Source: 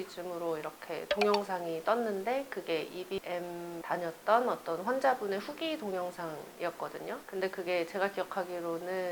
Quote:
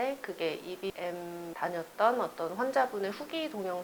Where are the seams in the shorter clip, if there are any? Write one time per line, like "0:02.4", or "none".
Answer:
none